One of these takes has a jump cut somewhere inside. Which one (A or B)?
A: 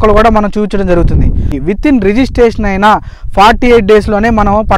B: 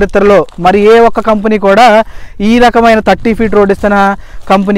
A